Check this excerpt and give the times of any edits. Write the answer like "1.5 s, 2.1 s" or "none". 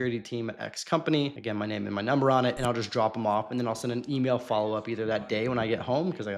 1.4 s